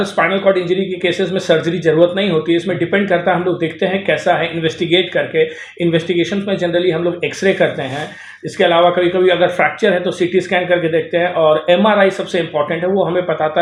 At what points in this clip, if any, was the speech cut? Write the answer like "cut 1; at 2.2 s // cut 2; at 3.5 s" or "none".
none